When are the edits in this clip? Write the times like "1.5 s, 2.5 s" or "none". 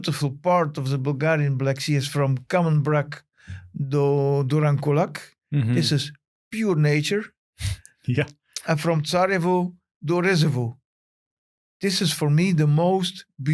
none

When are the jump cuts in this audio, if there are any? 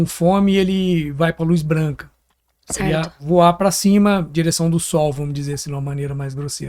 none

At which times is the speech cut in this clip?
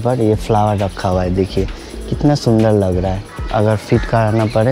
3.3 s

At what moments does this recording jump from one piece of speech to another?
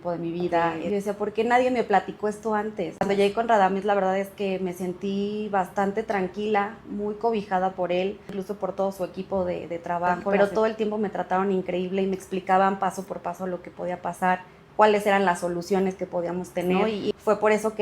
0.8 s, 3.1 s, 8.4 s, 10.3 s, 17.1 s

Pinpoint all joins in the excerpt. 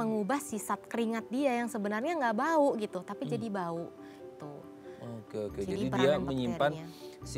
none

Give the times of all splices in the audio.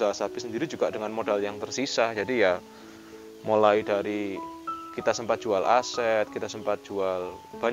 none

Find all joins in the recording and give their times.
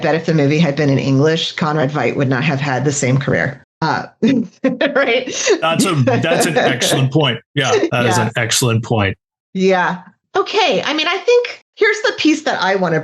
3.6 s, 10.2 s, 11.6 s

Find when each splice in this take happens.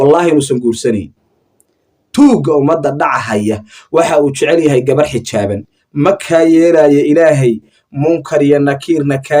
5.6 s

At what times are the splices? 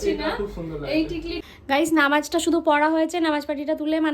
1.4 s

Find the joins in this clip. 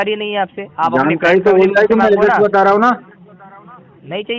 none

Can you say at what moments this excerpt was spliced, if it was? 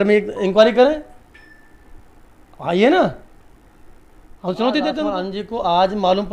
5.2 s

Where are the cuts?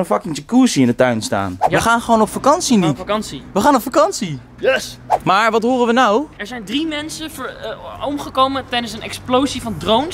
1.6 s, 5.2 s

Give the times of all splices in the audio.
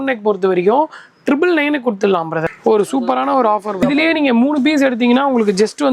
2.5 s, 3.8 s

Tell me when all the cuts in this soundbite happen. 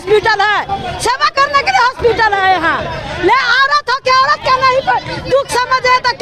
none

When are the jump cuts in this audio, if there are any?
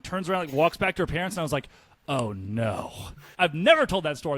3.0 s

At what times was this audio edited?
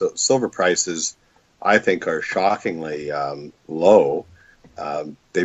1.0 s

